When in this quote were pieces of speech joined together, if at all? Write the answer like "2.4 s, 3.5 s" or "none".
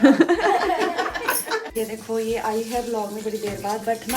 1.7 s